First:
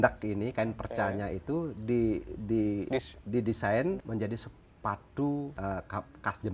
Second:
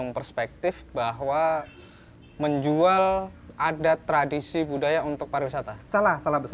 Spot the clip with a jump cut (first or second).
first